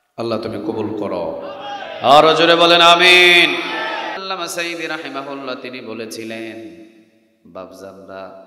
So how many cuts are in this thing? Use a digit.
1